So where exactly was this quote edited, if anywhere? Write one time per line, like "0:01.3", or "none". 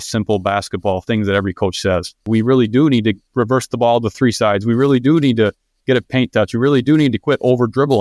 0:02.3